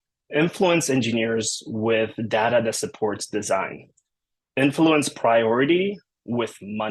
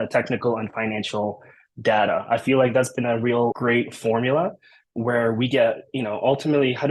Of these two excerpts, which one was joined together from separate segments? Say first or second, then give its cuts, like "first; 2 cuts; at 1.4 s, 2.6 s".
second; 1 cut; at 3.6 s